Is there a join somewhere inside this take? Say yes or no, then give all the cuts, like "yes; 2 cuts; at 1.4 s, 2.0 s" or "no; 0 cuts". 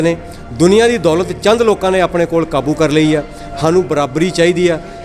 no; 0 cuts